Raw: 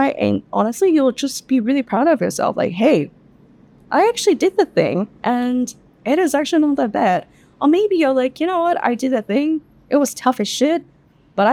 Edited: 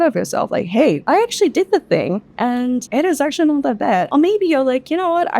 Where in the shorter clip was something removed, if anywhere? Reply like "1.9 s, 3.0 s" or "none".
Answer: 1.0 s, 2.9 s, 4.1 s